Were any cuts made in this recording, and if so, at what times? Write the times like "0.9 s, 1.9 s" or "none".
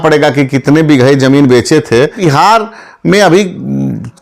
2.2 s